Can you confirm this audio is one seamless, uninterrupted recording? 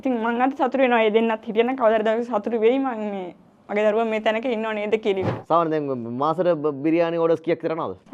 no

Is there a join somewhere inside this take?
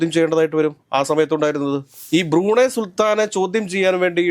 yes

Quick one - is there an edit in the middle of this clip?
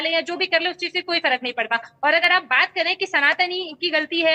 no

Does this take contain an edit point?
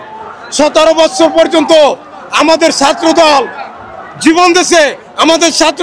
no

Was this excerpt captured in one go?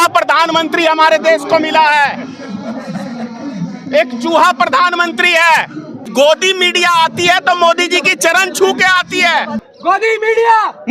no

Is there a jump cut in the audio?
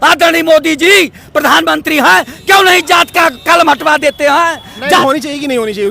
yes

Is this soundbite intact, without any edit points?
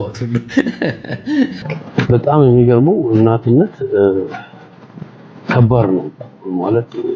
no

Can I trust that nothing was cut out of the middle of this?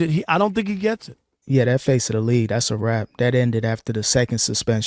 yes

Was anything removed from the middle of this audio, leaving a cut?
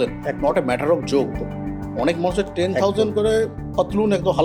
no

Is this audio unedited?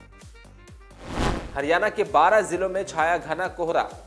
no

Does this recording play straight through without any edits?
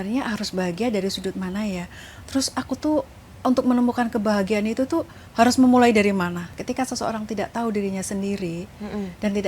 no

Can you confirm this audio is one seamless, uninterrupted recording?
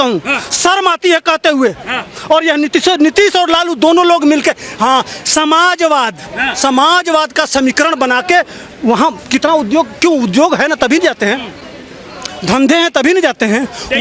yes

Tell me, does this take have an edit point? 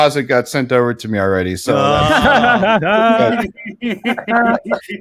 no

